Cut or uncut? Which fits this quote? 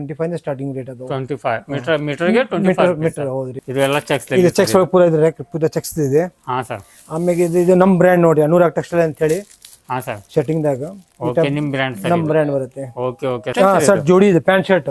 cut